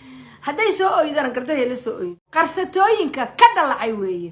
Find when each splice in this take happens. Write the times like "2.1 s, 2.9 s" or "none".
2.2 s

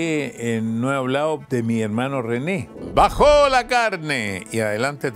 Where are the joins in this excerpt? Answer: 1.4 s, 2.8 s

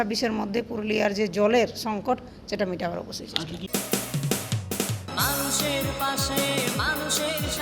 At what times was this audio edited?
3.6 s

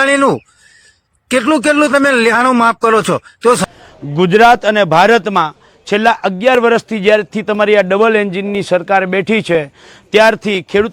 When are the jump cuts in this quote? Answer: 3.6 s

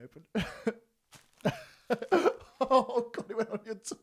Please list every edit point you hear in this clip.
none

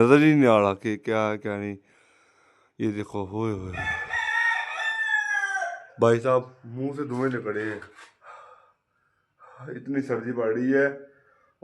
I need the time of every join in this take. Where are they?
none

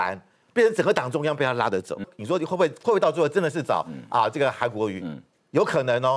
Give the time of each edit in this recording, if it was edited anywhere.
2.1 s

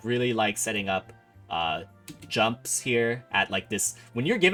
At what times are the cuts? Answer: none

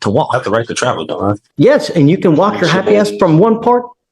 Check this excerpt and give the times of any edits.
1.4 s

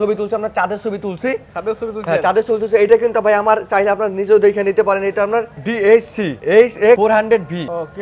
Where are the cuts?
none

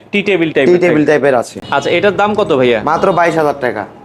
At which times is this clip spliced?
none

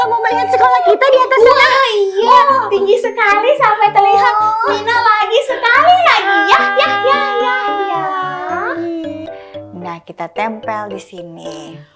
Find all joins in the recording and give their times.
9.2 s

